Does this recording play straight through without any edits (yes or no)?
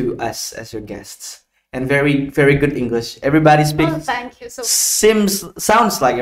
yes